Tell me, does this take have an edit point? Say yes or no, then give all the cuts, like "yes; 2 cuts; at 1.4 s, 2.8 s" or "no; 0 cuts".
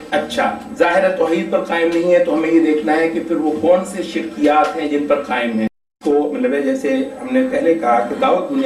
yes; 1 cut; at 5.9 s